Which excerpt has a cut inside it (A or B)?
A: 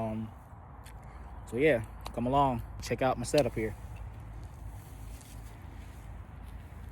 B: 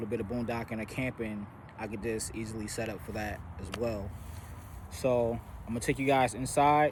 A